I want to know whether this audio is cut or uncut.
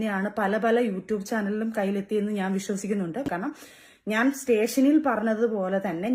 uncut